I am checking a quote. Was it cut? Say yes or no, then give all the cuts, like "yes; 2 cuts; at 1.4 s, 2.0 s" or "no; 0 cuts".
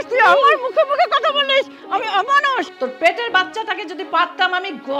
yes; 1 cut; at 2.7 s